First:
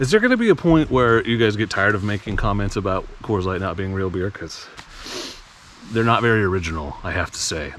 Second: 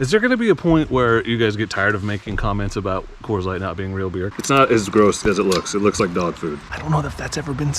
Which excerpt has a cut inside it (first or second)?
second